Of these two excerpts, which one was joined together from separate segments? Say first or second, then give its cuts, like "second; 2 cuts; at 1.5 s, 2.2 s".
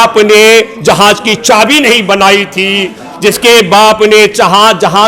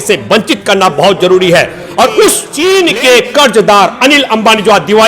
second; 1 cut; at 2.5 s